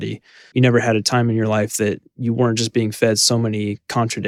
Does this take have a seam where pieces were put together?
no; 0 cuts

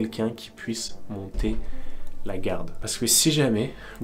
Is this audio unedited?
yes; 0 cuts

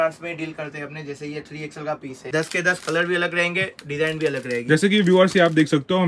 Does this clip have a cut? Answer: yes; 1 cut; at 2.3 s

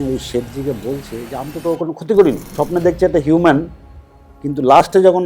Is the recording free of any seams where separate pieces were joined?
no; 1 cut; at 2.5 s

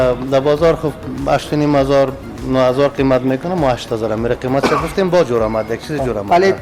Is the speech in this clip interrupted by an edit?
no; 0 cuts

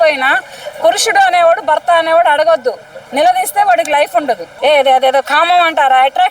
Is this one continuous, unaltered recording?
no; 1 cut; at 4.5 s

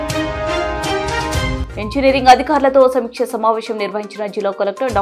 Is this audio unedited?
no; 1 cut; at 1.6 s

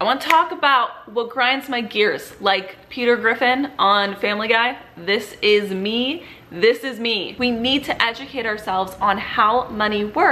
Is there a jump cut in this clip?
yes; 1 cut; at 7.3 s

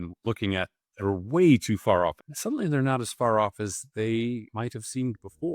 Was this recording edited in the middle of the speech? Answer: yes; 2 cuts; at 2.3 s, 4.5 s

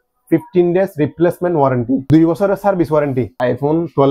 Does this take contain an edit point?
yes; 2 cuts; at 2.0 s, 3.4 s

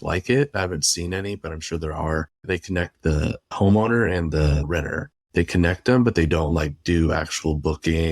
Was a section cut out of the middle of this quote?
yes; 3 cuts; at 2.4 s, 3.5 s, 4.6 s

